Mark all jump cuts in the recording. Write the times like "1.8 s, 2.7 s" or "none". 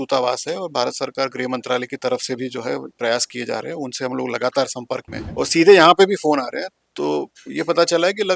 5.2 s